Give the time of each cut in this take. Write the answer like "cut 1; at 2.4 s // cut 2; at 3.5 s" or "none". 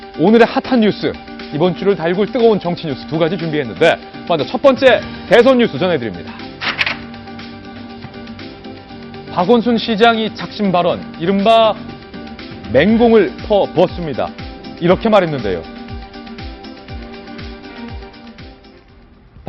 none